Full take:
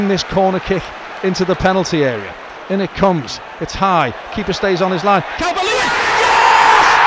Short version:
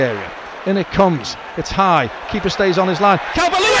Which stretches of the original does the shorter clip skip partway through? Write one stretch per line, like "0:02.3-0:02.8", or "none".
none